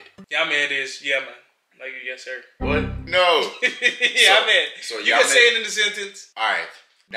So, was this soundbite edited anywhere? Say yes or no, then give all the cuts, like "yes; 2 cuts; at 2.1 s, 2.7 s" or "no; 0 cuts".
no; 0 cuts